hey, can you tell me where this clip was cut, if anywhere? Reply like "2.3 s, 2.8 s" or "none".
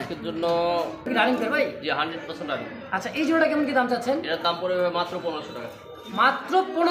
1.1 s